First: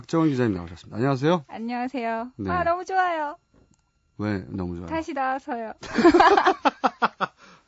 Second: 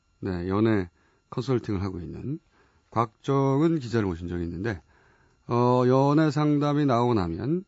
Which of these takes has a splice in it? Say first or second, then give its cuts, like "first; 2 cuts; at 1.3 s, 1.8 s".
first; 1 cut; at 6.4 s